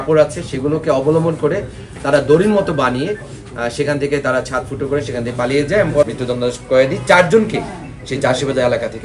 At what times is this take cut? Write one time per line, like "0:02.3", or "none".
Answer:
0:06.0